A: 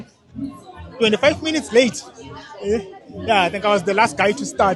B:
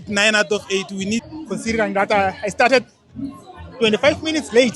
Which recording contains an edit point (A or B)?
B